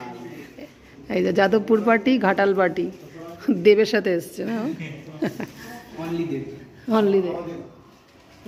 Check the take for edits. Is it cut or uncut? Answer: uncut